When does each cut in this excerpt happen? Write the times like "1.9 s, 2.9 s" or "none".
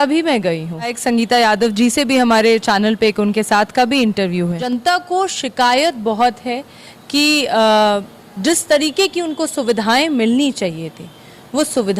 1.0 s, 4.7 s